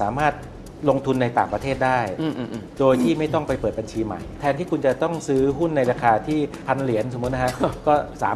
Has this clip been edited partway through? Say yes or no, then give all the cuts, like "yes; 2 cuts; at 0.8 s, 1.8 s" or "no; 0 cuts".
yes; 2 cuts; at 4.3 s, 6.6 s